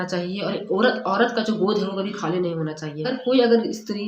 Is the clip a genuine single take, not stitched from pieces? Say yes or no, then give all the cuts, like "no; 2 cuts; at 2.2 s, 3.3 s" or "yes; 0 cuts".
no; 1 cut; at 3.1 s